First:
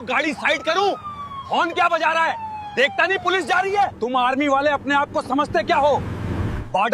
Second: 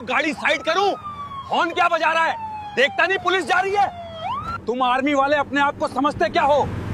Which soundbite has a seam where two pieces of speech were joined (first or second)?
first